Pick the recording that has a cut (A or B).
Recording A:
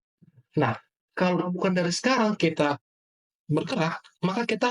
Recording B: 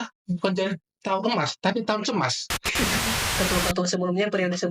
B